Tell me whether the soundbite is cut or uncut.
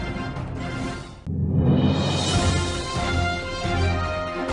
uncut